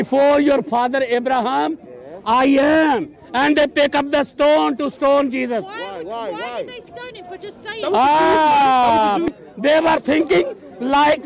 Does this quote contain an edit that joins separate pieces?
yes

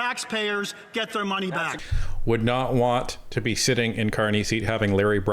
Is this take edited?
yes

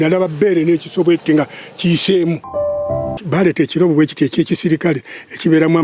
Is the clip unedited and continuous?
no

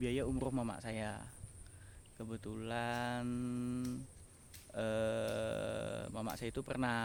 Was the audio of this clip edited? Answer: no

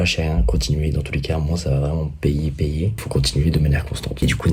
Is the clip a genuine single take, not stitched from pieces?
yes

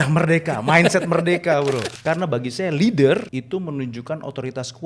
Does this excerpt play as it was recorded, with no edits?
no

